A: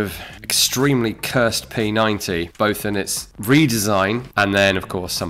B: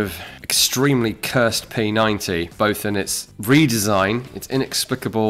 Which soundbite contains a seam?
A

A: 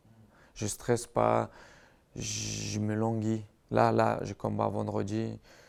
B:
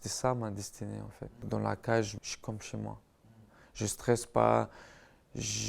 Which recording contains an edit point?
B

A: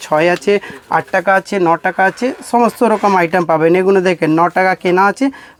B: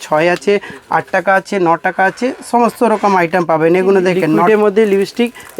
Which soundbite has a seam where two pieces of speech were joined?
B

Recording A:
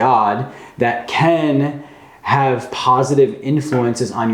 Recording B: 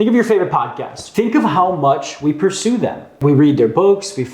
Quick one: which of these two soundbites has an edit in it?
B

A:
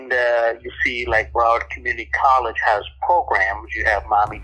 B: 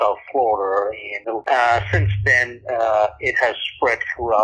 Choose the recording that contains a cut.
B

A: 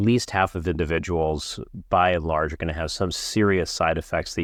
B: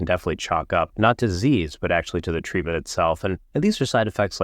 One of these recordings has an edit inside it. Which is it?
B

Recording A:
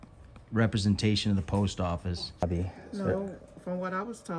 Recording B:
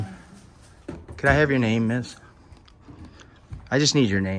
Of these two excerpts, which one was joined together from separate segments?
A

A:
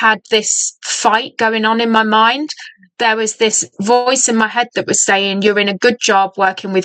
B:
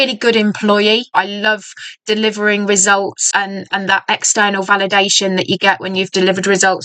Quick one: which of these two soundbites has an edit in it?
B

